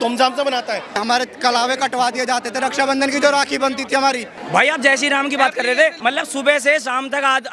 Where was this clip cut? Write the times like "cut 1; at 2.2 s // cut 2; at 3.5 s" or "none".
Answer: cut 1; at 1.0 s // cut 2; at 4.3 s // cut 3; at 6.0 s